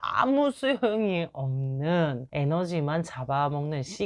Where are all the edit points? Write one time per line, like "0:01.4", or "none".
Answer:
0:02.2